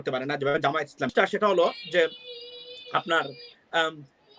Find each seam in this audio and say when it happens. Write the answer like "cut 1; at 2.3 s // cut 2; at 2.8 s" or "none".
cut 1; at 1.0 s